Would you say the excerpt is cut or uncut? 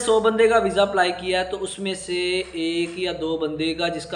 uncut